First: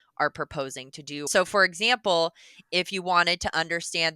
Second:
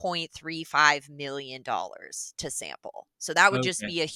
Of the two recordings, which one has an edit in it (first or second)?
first